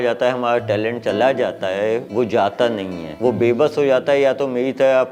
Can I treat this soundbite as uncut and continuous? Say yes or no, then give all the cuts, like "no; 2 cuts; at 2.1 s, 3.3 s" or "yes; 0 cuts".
yes; 0 cuts